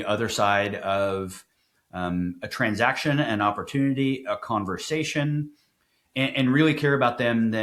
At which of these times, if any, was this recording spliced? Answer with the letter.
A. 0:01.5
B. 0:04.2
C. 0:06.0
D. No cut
D